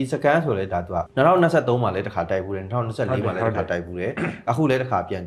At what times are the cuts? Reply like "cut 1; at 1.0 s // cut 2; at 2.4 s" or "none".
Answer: cut 1; at 1.1 s